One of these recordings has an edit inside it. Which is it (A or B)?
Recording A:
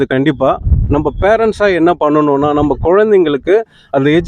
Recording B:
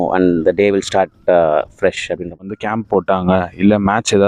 B